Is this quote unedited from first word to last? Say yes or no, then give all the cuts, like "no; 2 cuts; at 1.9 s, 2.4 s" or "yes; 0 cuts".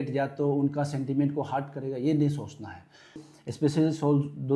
no; 1 cut; at 3.2 s